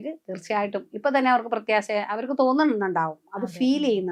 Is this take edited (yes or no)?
no